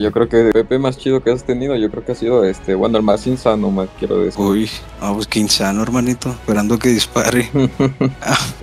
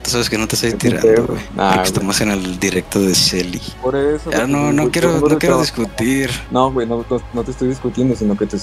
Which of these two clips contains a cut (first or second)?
second